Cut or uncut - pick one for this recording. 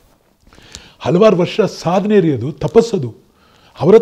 uncut